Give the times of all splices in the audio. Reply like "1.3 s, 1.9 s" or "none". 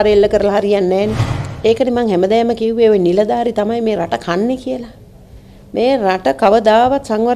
1.3 s

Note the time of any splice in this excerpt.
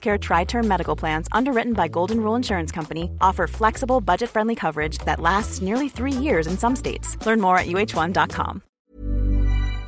8.7 s

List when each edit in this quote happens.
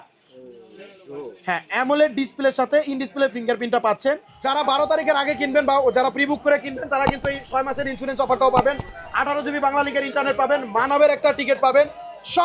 4.3 s

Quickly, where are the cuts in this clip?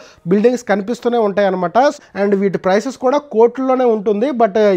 2.0 s

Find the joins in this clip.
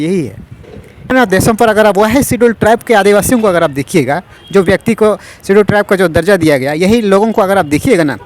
1.1 s

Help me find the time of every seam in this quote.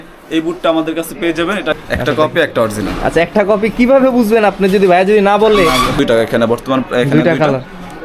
1.7 s, 6.0 s

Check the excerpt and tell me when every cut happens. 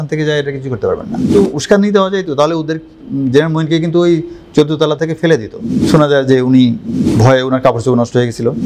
1.2 s, 5.8 s

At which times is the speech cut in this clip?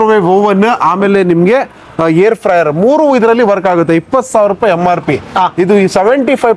none

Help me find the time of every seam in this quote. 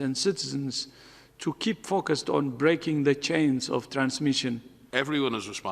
4.7 s

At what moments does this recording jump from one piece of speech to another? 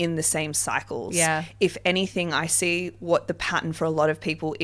none

